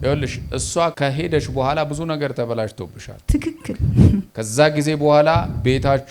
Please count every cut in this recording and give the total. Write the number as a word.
two